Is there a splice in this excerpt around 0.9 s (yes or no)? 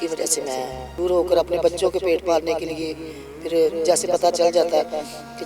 yes